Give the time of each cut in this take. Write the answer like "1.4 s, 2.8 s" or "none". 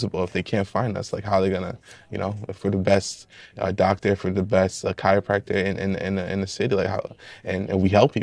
none